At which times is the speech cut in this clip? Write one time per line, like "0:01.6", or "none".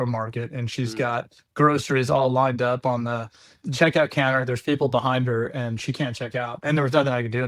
0:06.6